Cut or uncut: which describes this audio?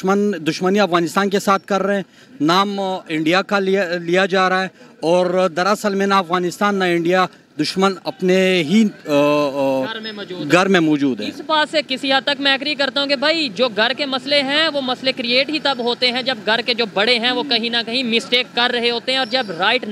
uncut